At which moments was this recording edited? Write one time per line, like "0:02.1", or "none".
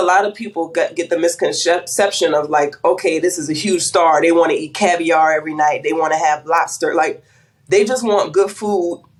none

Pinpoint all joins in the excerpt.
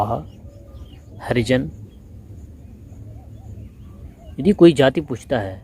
0:03.9

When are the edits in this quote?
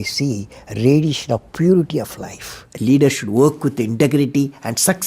0:02.6

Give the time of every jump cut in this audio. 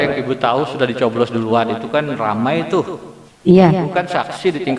none

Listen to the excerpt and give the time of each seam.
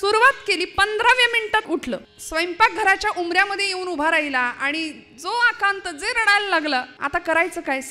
0:01.7
0:07.0

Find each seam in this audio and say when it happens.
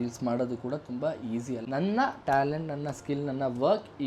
0:01.6

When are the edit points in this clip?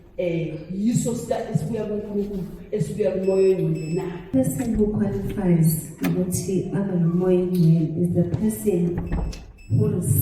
0:04.2

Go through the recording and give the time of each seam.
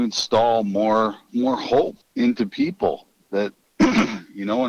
0:01.2
0:02.0
0:03.6

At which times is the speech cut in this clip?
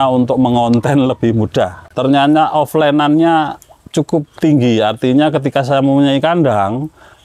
0:01.8

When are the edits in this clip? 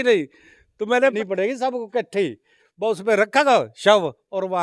0:01.1

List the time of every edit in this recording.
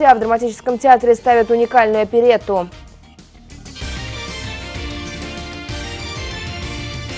0:03.2

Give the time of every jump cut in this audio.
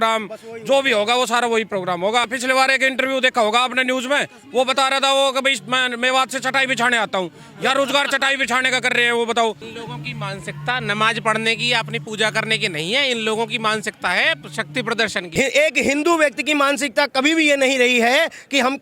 0:02.3
0:09.7
0:15.2

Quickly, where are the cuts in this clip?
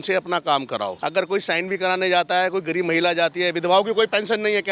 0:01.0

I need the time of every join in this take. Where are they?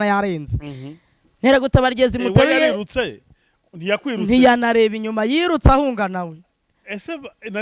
none

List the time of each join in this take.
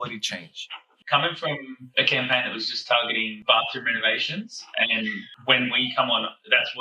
0:00.9
0:01.8
0:03.3

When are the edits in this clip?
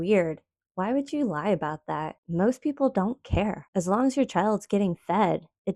none

